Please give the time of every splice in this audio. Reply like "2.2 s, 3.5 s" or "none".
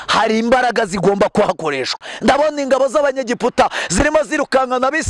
2.1 s